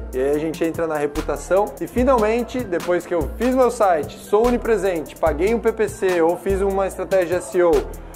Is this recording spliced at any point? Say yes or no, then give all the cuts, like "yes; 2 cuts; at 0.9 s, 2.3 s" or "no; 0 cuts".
yes; 1 cut; at 1.8 s